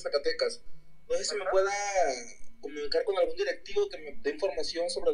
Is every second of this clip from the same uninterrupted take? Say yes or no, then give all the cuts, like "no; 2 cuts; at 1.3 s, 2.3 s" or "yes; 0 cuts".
yes; 0 cuts